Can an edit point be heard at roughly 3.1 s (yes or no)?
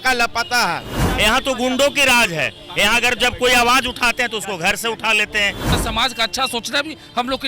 no